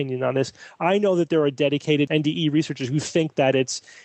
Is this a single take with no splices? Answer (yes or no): no